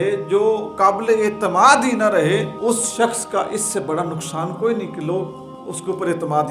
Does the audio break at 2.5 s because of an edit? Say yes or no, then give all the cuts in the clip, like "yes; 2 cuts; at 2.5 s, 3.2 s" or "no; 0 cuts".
yes; 1 cut; at 2.5 s